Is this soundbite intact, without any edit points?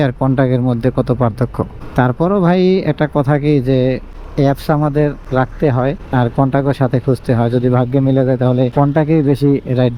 yes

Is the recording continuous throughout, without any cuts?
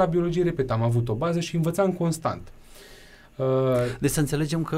yes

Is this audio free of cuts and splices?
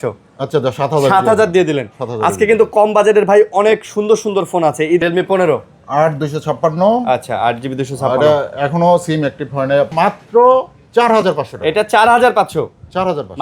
no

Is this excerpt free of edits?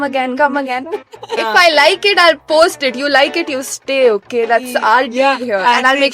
no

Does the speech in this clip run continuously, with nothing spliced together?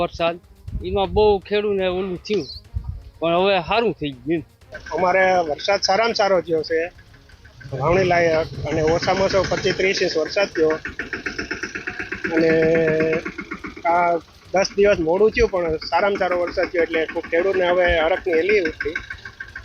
yes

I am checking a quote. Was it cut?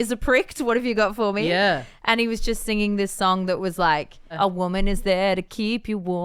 yes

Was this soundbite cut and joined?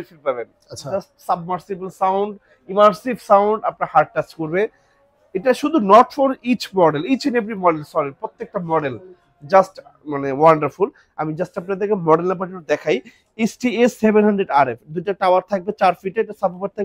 no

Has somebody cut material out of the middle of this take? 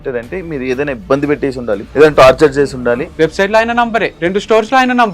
yes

